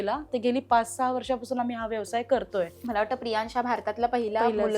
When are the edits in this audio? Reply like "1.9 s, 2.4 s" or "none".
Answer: 2.8 s